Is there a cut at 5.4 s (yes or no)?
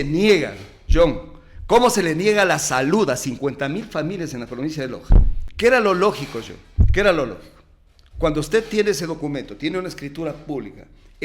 yes